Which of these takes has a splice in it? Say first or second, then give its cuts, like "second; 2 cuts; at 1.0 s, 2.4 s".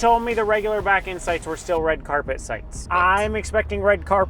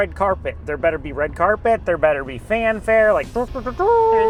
first; 1 cut; at 2.7 s